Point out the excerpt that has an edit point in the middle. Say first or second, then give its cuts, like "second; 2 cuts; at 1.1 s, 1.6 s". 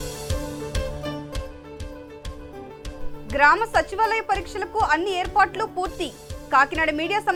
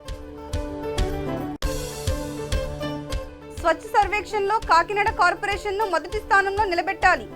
second; 2 cuts; at 1.6 s, 3.4 s